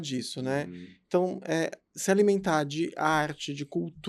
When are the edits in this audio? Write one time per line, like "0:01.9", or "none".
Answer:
none